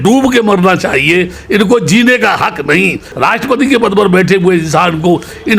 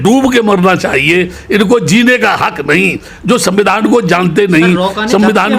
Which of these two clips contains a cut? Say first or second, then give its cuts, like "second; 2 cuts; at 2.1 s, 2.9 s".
first; 1 cut; at 3.1 s